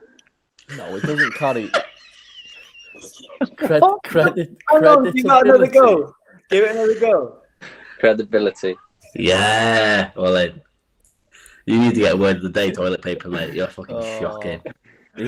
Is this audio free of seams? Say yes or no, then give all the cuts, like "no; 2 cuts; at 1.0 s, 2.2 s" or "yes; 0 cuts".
yes; 0 cuts